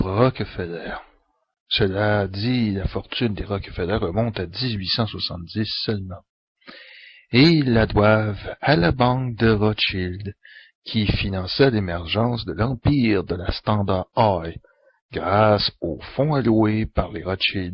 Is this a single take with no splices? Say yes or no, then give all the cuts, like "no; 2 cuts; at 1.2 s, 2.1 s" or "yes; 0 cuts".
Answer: no; 1 cut; at 12.8 s